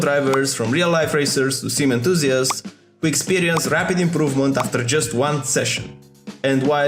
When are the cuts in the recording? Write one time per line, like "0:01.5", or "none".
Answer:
none